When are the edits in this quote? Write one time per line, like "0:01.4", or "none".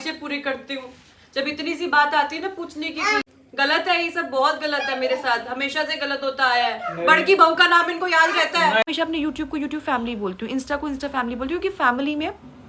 0:03.3
0:08.9